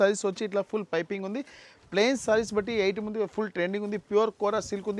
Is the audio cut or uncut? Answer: uncut